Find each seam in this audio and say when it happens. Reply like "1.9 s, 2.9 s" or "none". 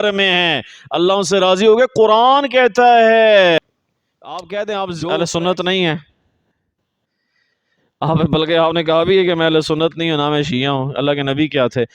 3.6 s